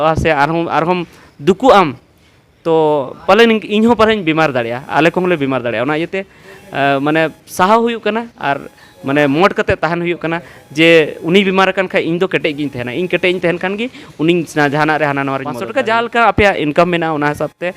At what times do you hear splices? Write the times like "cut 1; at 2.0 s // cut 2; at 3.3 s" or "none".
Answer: cut 1; at 15.6 s